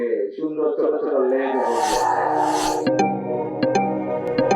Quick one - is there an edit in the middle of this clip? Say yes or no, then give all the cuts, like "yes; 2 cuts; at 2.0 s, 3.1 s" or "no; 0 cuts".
no; 0 cuts